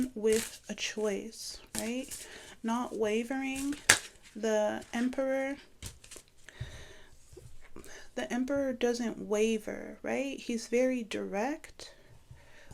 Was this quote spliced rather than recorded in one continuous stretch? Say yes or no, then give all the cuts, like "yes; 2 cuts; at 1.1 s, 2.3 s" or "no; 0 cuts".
no; 0 cuts